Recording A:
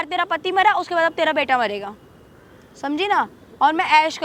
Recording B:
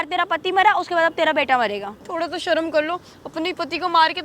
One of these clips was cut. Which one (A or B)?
B